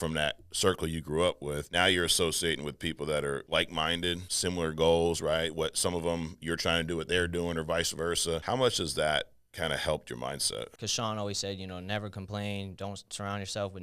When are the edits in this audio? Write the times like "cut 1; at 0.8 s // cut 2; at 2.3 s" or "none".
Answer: cut 1; at 1.6 s // cut 2; at 3.4 s // cut 3; at 4.3 s // cut 4; at 8.4 s // cut 5; at 10.8 s